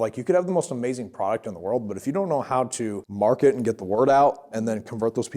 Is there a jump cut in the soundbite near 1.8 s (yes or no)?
no